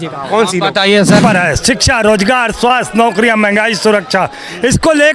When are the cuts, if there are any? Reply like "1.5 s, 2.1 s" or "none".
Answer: 1.2 s